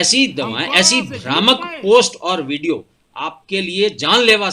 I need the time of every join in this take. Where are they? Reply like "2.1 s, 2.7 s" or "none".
none